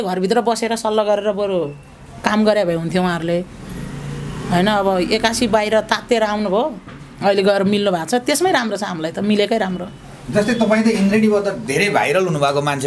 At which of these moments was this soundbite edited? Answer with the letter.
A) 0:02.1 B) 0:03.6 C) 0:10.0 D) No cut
D